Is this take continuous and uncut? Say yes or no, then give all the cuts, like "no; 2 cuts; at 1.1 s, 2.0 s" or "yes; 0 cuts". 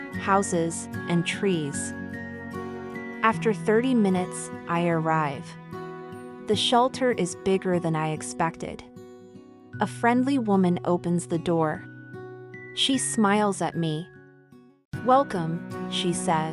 yes; 0 cuts